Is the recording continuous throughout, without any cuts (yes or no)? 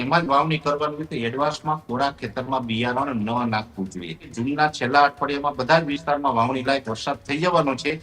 no